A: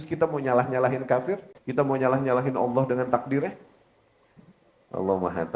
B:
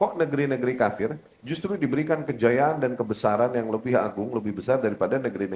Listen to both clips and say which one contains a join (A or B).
A